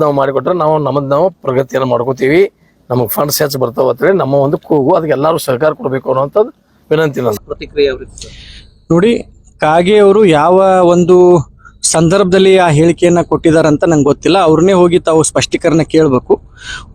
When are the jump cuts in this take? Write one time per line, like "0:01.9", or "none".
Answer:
0:07.3